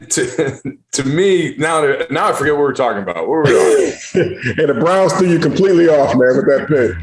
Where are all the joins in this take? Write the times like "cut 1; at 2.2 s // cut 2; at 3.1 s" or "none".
none